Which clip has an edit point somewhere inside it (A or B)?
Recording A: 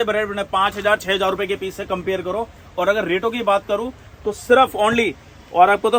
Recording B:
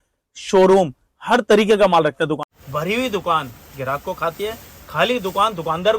B